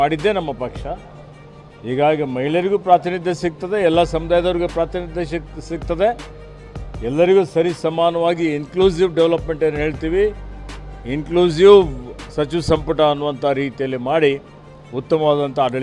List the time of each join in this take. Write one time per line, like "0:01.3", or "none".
none